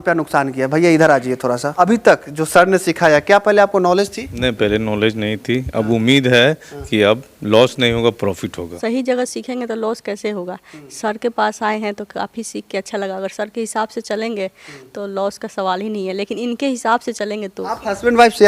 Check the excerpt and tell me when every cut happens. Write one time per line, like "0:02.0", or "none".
0:01.7
0:08.7
0:17.6